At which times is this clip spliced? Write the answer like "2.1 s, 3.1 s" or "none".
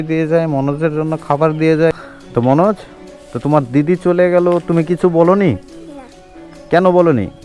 1.9 s